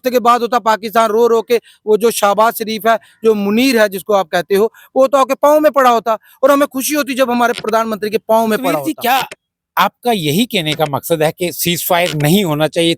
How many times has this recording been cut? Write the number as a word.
one